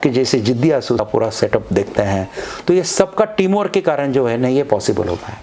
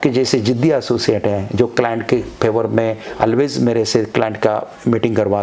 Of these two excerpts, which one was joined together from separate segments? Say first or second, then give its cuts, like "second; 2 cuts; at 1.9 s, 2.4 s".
first; 1 cut; at 1.0 s